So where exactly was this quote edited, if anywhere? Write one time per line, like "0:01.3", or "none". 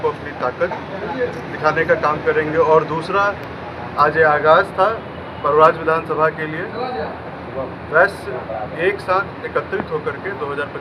none